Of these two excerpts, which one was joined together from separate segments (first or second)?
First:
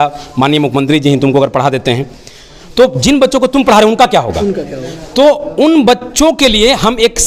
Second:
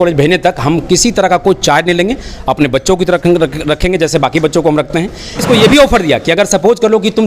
second